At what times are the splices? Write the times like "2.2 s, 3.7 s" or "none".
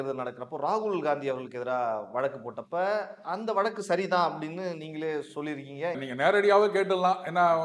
6.0 s